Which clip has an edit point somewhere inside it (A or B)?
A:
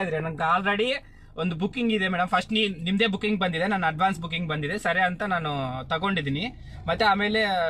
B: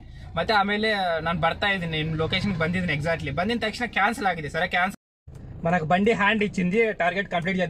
B